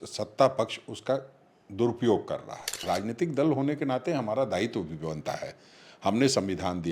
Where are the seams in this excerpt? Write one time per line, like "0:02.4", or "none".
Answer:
0:02.8